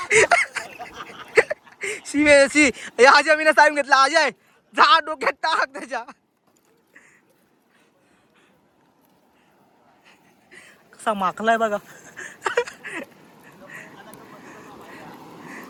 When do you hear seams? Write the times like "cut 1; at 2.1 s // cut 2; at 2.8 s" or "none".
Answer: none